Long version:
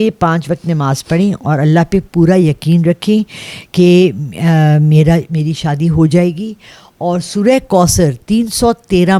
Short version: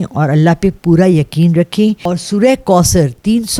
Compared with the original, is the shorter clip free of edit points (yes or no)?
no